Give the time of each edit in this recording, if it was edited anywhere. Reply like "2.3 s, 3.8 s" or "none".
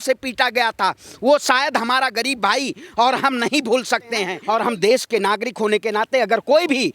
4.3 s